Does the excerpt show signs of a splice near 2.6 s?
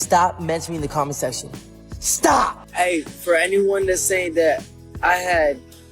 yes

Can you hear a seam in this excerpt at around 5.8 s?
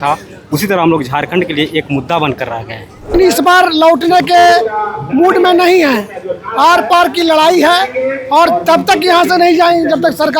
no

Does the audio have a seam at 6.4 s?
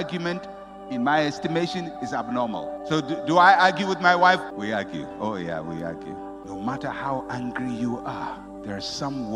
yes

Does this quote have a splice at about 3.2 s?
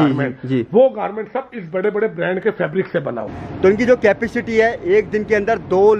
yes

